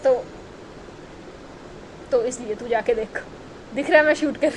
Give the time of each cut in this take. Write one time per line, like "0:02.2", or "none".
none